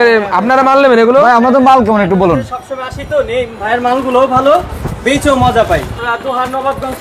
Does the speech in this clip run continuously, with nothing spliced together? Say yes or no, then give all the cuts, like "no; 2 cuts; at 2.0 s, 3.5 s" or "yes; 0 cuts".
no; 1 cut; at 6.0 s